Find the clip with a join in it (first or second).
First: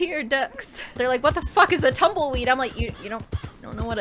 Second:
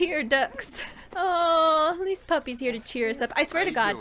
first